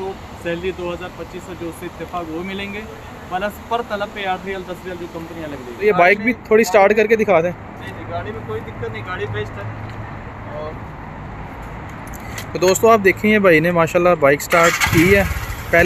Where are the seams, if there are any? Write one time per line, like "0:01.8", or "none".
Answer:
0:05.8

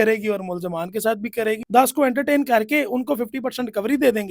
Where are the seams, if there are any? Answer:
0:01.6

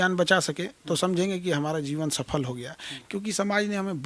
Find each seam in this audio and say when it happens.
none

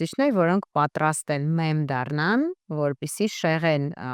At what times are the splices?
none

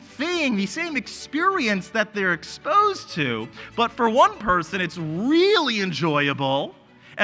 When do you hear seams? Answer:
none

